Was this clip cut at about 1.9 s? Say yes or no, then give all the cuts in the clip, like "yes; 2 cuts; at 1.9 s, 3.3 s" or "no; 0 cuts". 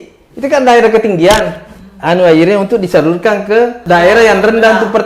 no; 1 cut; at 3.8 s